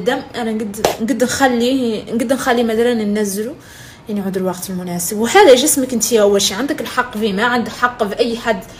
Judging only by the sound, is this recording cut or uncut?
cut